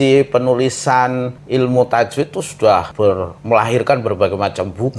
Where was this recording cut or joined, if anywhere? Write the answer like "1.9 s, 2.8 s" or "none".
1.3 s, 3.0 s